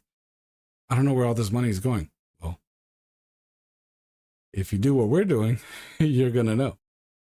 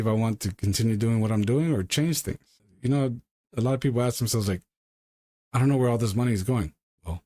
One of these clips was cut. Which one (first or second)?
second